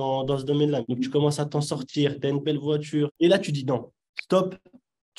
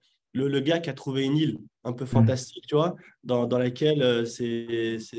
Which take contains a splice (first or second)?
first